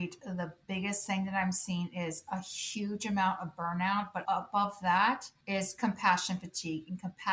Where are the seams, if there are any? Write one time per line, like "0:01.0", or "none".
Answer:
0:04.2
0:05.3